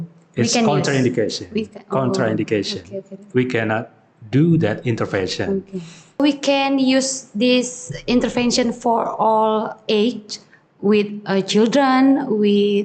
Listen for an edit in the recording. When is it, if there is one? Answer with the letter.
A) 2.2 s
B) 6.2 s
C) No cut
B